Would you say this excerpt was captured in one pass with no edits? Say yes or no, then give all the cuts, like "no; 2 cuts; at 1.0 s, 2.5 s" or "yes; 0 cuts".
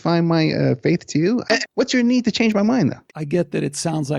no; 2 cuts; at 1.5 s, 3.1 s